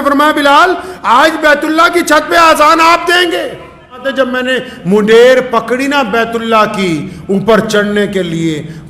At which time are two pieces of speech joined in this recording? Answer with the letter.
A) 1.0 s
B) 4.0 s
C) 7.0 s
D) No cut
B